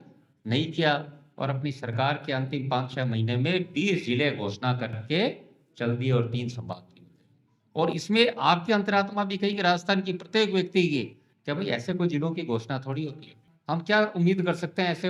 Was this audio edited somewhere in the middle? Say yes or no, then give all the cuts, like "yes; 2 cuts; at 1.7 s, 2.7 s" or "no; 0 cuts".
yes; 1 cut; at 13.5 s